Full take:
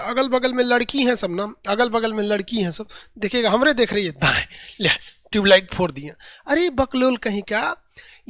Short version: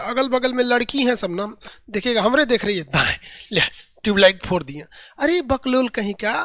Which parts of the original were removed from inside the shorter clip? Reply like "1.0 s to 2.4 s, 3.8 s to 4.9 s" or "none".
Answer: 1.6 s to 2.8 s